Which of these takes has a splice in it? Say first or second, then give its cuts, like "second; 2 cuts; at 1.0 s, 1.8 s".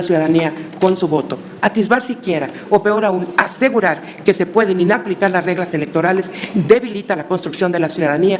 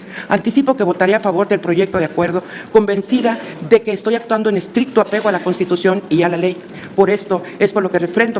second; 1 cut; at 6.7 s